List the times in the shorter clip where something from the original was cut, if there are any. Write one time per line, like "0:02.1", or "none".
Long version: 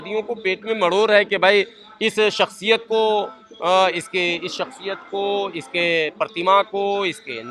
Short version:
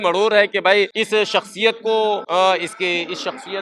0:01.0
0:02.2

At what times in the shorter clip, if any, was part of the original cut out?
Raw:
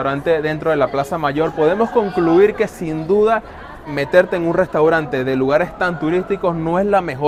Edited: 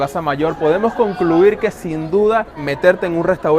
0:02.6

